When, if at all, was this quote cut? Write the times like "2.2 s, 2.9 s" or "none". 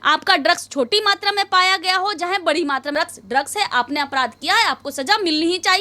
2.9 s